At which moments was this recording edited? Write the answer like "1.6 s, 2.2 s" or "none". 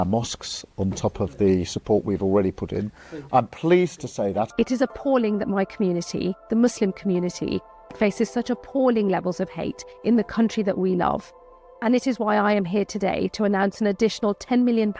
4.5 s